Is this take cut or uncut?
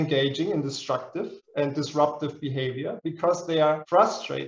uncut